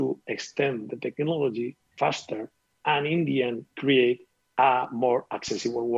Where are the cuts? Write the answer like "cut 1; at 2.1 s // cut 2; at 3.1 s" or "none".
cut 1; at 1.9 s